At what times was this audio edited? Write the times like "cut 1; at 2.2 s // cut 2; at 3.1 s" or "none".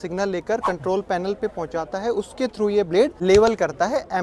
cut 1; at 3.2 s